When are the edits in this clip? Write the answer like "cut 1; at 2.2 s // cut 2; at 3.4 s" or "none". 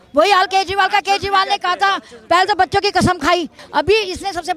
cut 1; at 3.6 s